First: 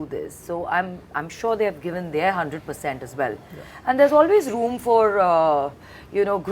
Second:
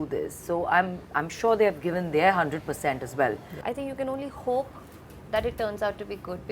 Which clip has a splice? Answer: second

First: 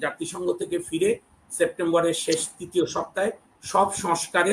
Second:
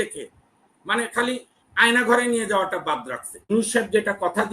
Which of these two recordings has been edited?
second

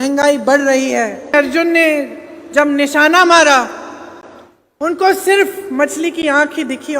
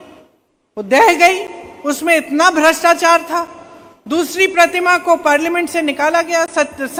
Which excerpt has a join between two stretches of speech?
first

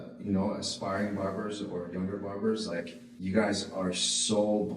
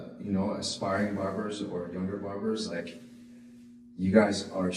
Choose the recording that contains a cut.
first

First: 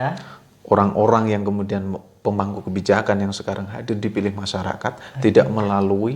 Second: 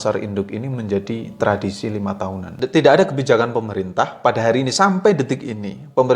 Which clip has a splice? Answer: second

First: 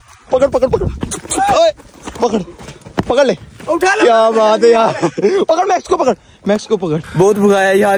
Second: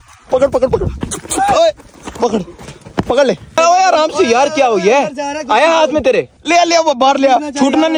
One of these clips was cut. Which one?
second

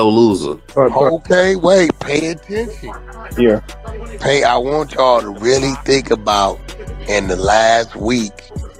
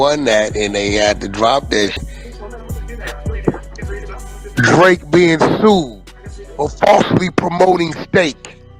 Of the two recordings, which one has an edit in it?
second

